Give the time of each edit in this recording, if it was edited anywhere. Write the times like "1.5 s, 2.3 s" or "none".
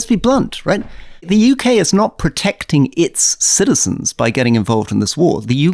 0.9 s